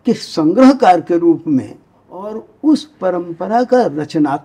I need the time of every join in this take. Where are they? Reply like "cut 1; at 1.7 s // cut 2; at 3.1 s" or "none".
cut 1; at 2.4 s